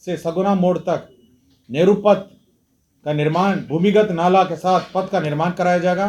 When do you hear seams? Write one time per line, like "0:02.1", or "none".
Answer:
none

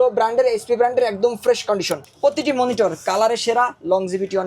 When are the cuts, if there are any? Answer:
0:02.0

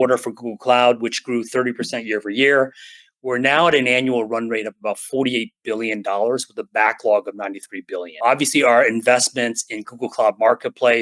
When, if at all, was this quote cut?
0:08.2

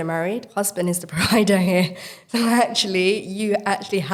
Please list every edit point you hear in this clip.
none

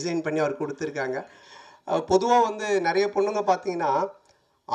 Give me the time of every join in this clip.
0:01.4

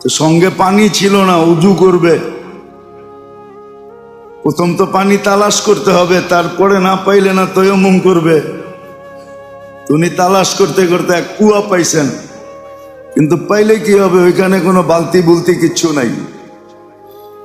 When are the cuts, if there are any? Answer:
none

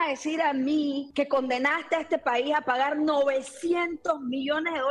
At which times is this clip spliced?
0:01.0

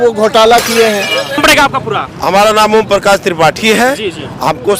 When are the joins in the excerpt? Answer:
0:01.4

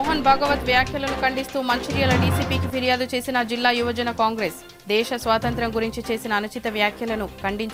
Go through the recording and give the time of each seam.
none

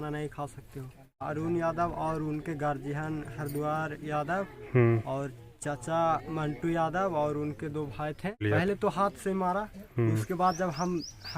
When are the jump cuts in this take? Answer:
0:01.2
0:08.4

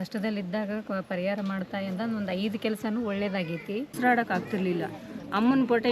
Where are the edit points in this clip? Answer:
0:03.9

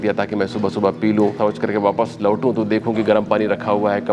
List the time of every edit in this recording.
0:01.4

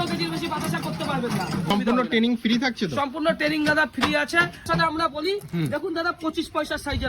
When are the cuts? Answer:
0:01.7
0:04.6

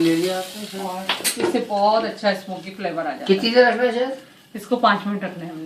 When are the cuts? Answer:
none

